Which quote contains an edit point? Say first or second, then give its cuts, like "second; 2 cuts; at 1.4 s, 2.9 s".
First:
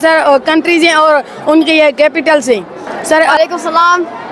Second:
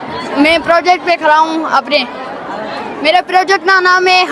first; 1 cut; at 3.4 s